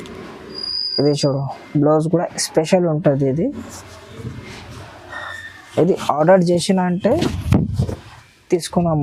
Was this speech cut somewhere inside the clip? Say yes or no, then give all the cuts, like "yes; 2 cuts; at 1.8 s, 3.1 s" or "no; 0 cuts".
no; 0 cuts